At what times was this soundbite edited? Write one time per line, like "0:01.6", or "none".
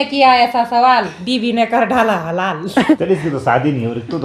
0:03.0